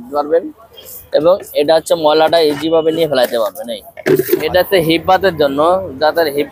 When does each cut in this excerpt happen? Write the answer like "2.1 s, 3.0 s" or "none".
4.4 s